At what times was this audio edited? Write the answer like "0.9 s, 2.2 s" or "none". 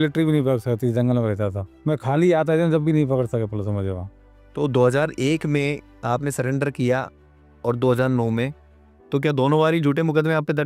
none

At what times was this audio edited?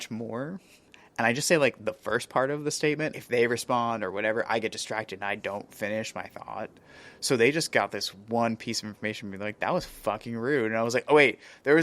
3.1 s

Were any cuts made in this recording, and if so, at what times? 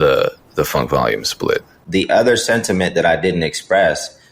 1.8 s

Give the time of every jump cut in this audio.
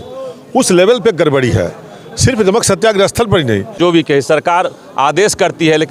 3.8 s

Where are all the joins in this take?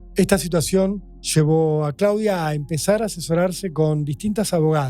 none

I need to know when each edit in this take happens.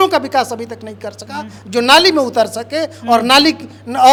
none

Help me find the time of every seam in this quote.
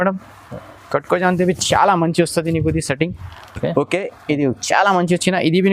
none

